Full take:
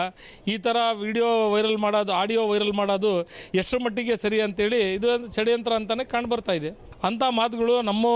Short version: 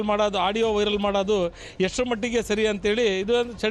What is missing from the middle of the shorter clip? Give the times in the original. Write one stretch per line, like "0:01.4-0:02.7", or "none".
none